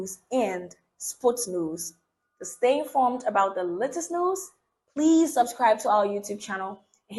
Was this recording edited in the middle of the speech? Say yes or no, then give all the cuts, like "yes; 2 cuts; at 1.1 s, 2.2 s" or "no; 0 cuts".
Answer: no; 0 cuts